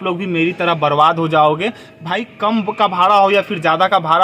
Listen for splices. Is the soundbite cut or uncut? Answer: uncut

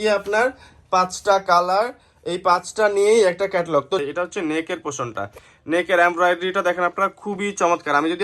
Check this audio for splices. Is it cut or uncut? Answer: cut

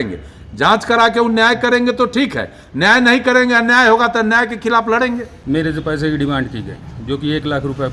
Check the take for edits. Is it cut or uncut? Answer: cut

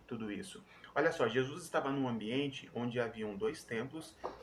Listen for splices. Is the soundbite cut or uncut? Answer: uncut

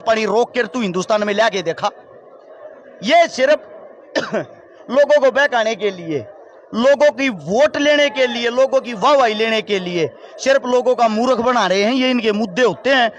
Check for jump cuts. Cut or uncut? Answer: uncut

